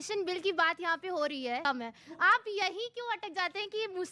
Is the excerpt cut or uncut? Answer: cut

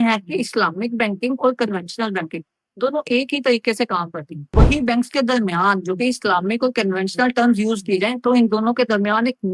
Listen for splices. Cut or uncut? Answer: cut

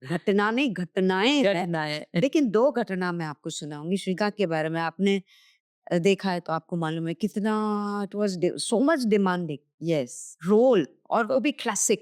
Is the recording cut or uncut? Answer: uncut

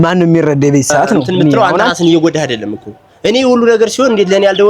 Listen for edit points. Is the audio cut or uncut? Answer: cut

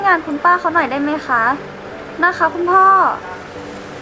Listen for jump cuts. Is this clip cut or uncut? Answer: uncut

